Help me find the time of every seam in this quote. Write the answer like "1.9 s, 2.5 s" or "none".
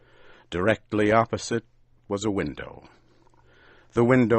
1.3 s